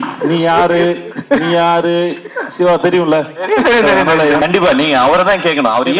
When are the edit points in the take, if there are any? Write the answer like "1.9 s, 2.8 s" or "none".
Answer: 4.4 s